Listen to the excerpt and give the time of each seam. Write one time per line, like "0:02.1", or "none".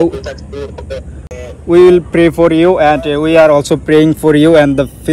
0:01.2